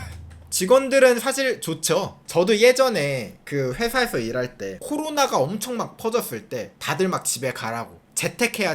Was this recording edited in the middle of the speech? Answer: yes; 1 cut; at 2.2 s

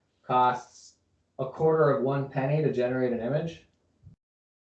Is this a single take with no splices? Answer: yes; 0 cuts

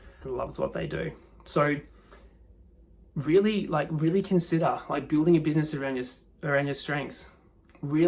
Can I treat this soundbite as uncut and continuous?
yes; 0 cuts

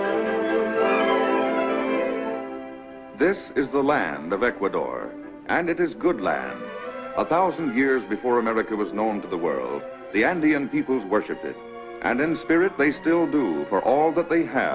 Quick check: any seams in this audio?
no; 0 cuts

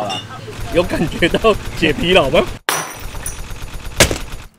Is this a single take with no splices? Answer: yes; 0 cuts

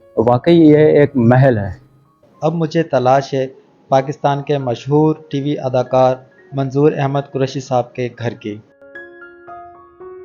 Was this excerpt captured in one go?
no; 1 cut; at 2.3 s

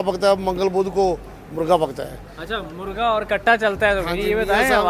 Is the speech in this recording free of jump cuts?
yes; 0 cuts

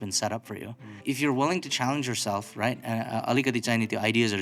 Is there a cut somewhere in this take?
yes; 1 cut; at 1.0 s

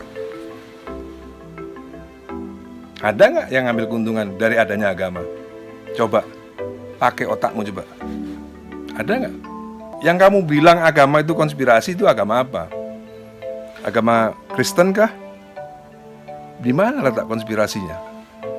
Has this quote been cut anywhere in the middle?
yes; 1 cut; at 10.0 s

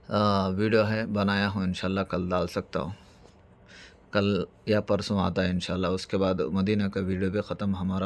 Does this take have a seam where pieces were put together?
no; 0 cuts

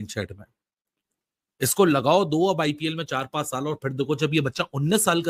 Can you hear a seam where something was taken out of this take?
no; 0 cuts

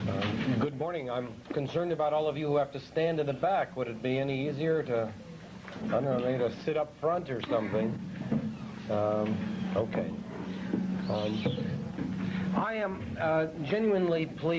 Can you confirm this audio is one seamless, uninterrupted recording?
no; 1 cut; at 4.1 s

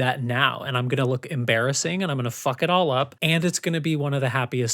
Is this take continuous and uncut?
no; 1 cut; at 3.2 s

